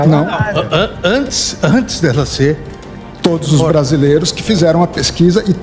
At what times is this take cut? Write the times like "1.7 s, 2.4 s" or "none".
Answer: none